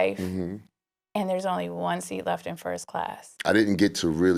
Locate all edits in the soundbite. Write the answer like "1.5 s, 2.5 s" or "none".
3.2 s